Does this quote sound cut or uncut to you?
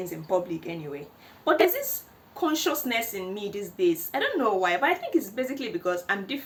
uncut